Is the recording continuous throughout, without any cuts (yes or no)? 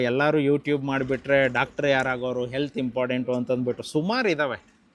yes